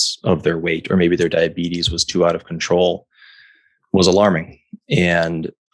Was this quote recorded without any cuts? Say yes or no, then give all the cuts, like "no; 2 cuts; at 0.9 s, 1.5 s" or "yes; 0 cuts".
yes; 0 cuts